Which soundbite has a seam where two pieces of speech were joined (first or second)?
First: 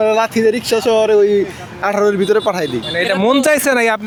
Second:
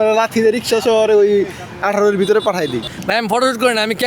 second